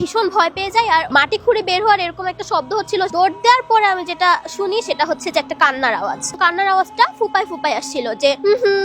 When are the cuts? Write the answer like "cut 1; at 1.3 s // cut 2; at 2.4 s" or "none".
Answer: cut 1; at 1.1 s // cut 2; at 3.1 s // cut 3; at 6.3 s